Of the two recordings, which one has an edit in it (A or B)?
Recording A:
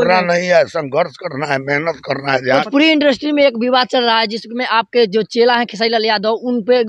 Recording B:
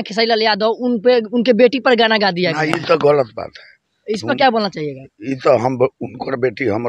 A